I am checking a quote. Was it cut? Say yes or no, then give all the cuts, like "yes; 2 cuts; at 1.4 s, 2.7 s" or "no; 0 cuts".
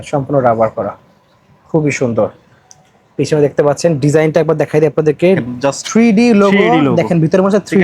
yes; 1 cut; at 5.5 s